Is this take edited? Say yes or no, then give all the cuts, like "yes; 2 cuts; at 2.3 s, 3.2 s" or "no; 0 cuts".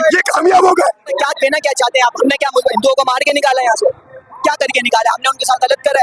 yes; 1 cut; at 1.1 s